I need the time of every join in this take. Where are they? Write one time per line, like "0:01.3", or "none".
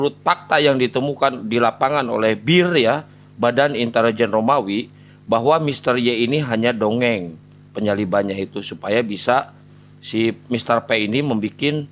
none